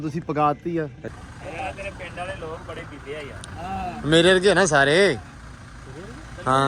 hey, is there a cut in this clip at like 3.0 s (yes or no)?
no